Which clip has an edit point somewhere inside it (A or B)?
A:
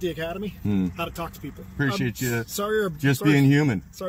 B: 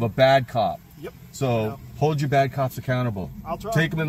A